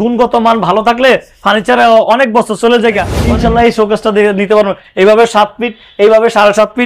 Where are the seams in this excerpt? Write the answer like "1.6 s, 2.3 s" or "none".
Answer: 3.1 s